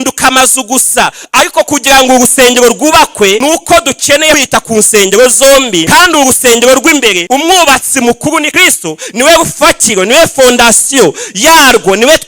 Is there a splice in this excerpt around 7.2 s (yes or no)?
yes